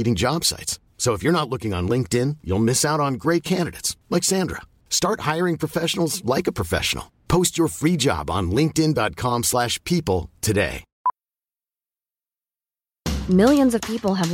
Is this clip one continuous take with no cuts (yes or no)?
no